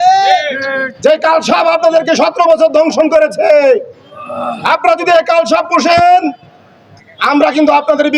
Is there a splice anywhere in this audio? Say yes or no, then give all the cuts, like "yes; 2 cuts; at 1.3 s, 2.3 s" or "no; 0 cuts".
no; 0 cuts